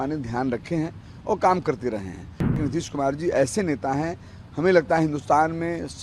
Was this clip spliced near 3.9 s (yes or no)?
no